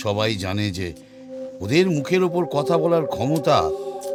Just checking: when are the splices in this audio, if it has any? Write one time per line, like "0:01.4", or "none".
none